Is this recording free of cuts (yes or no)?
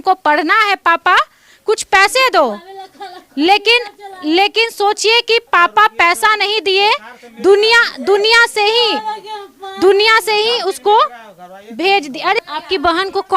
no